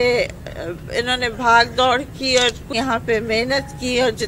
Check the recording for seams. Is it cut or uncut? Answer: cut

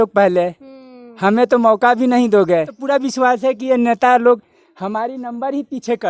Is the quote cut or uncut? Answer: cut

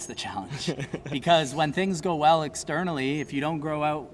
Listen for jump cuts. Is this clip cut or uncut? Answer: uncut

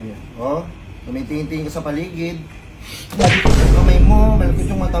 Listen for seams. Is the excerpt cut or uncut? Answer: uncut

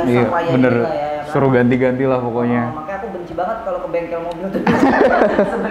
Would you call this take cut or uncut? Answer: uncut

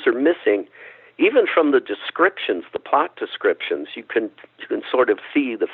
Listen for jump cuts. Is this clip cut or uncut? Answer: uncut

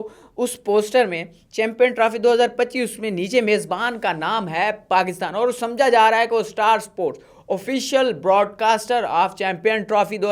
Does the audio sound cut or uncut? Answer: uncut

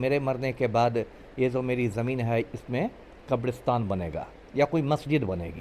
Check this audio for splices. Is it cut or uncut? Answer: uncut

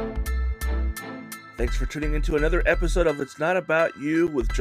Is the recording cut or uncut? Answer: uncut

